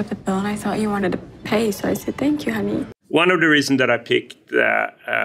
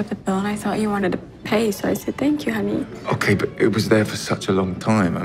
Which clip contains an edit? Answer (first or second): second